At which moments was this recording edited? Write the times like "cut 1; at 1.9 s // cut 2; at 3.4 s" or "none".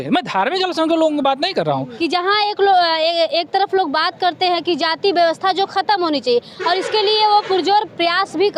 cut 1; at 1.9 s

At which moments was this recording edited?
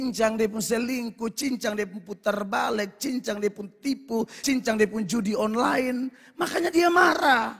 cut 1; at 4.4 s

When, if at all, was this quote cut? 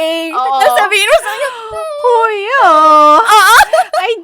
none

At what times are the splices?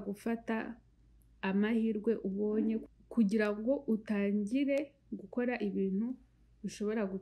none

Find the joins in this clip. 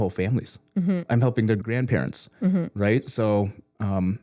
cut 1; at 1.6 s

